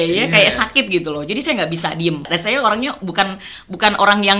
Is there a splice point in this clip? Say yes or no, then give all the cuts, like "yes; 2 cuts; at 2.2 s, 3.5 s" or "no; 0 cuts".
yes; 1 cut; at 2.3 s